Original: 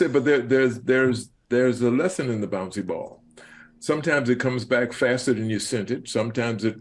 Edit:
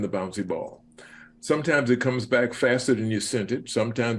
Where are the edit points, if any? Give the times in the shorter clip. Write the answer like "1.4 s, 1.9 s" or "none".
none